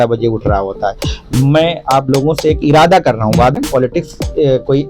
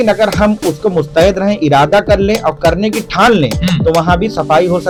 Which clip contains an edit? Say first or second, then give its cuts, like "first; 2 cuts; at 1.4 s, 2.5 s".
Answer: first; 1 cut; at 3.5 s